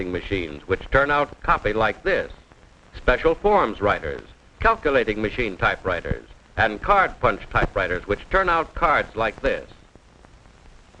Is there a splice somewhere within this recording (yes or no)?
no